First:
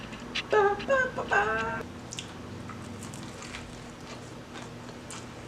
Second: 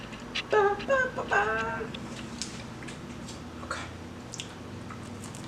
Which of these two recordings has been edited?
first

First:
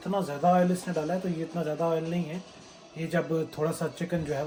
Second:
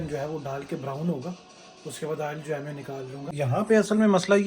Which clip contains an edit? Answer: second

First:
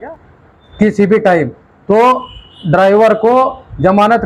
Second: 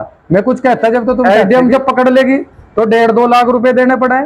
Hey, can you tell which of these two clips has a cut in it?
second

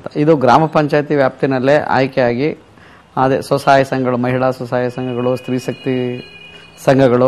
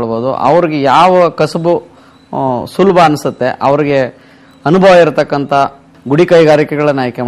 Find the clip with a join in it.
second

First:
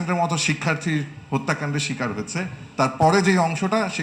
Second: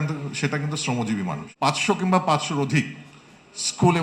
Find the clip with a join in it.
second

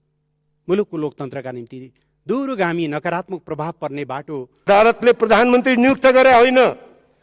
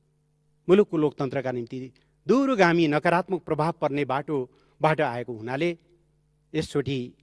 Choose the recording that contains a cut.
first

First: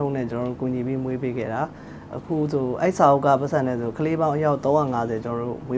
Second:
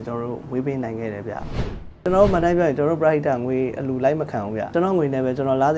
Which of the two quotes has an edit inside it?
second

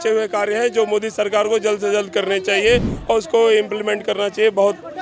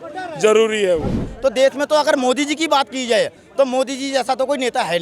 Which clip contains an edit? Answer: second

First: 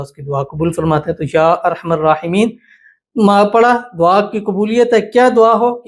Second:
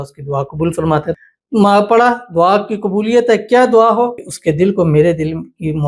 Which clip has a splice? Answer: second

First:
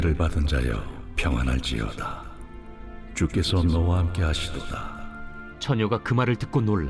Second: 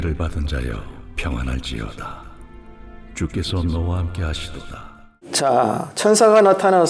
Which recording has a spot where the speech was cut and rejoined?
first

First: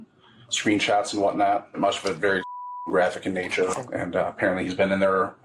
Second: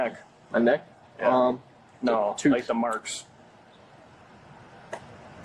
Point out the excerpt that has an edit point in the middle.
first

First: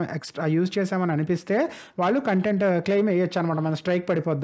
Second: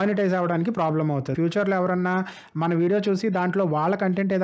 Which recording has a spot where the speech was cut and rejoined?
second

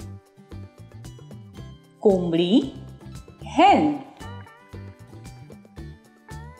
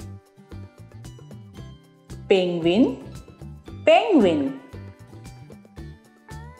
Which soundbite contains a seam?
first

